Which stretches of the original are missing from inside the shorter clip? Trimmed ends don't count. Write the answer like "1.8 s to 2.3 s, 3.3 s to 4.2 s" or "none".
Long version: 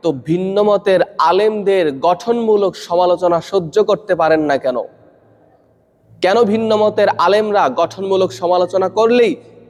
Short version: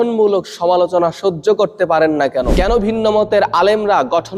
4.8 s to 6.2 s